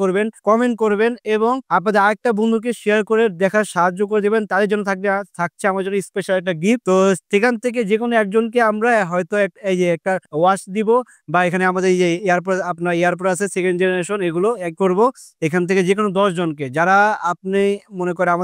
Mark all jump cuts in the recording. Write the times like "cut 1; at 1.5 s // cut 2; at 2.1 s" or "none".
none